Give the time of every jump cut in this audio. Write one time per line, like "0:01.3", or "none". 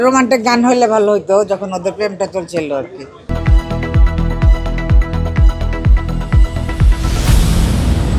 none